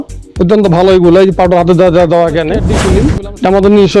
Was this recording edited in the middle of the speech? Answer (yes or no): yes